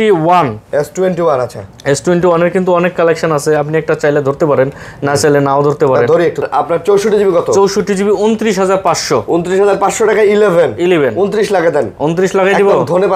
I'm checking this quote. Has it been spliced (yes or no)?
yes